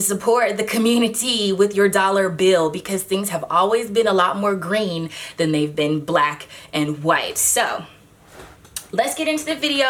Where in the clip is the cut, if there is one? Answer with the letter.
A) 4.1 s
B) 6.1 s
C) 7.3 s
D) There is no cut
D